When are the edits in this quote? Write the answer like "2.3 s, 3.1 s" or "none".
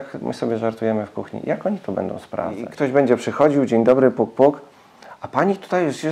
2.6 s